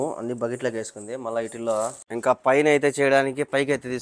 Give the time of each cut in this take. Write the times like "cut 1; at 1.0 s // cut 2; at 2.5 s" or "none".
cut 1; at 2.0 s